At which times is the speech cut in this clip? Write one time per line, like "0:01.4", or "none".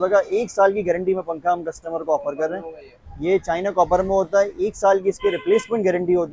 none